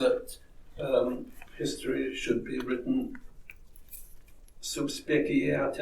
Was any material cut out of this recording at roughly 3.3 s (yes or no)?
no